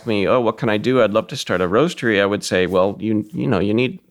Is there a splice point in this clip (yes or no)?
no